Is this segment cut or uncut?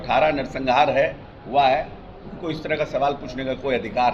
uncut